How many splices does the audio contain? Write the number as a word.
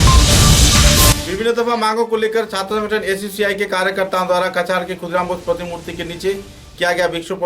one